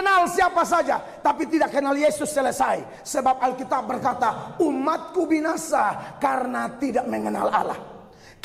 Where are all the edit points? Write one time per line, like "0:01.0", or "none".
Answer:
none